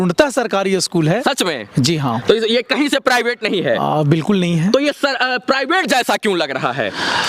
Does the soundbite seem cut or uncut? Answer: uncut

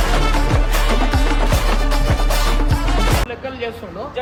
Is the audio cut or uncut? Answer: uncut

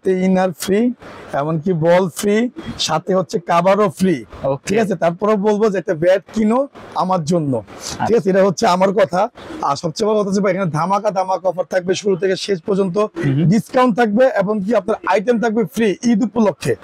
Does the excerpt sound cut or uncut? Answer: uncut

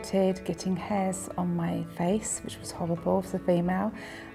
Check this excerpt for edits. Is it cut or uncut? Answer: uncut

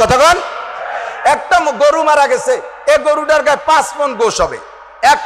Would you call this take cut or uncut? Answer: uncut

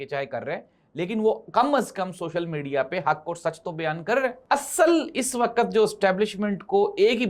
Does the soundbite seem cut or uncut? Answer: cut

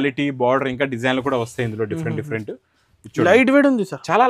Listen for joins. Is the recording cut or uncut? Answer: uncut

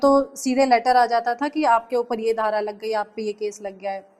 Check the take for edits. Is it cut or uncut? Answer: uncut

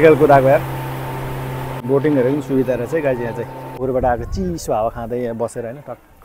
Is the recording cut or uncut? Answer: cut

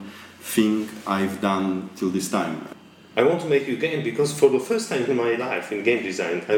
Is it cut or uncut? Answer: cut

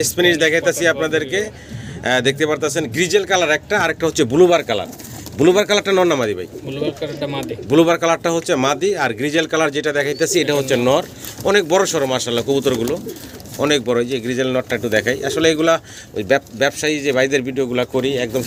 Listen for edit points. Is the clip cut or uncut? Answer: uncut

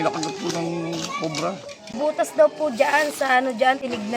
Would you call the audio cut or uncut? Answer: cut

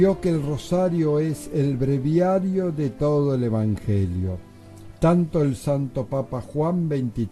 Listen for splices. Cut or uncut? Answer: cut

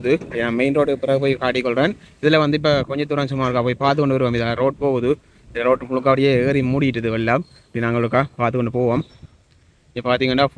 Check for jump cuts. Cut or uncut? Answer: uncut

